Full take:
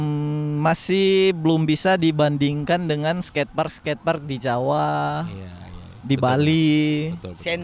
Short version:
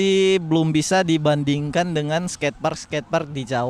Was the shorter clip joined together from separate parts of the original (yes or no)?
no